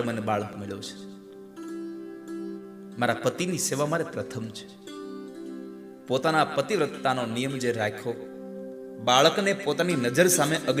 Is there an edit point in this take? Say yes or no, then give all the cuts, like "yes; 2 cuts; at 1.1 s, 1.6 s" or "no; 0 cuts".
yes; 1 cut; at 2.6 s